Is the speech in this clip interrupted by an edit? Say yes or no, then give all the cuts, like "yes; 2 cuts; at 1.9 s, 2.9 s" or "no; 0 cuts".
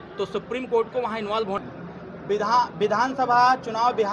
yes; 1 cut; at 1.6 s